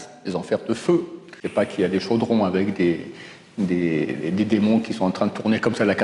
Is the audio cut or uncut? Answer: cut